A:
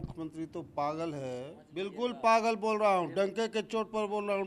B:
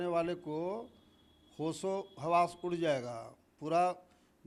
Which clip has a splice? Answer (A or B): A